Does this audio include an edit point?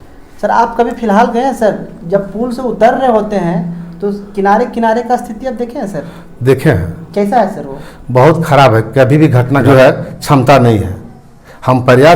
yes; 1 cut; at 9.6 s

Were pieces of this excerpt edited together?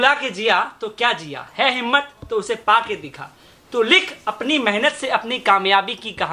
no; 0 cuts

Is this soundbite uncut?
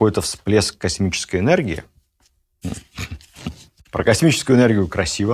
no; 1 cut; at 3.7 s

